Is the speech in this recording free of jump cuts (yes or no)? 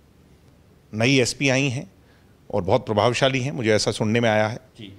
yes